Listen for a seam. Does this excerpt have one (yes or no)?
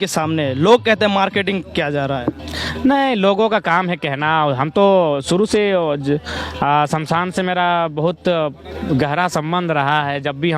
no